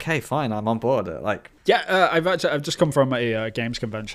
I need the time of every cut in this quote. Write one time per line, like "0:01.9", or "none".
0:01.5

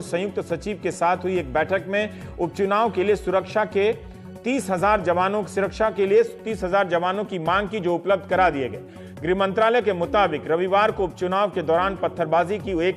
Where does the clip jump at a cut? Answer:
none

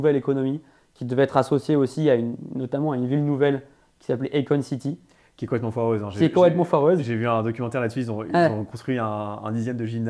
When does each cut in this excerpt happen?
none

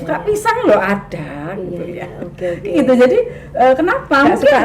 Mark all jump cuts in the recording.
none

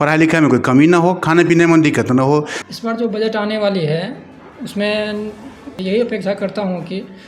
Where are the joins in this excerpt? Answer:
0:02.6
0:05.7

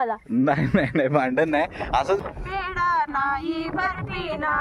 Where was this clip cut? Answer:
0:02.2

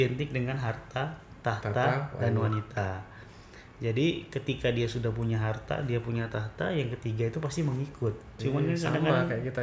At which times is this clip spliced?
0:08.3

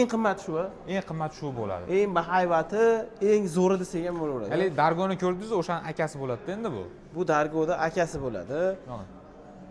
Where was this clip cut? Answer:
none

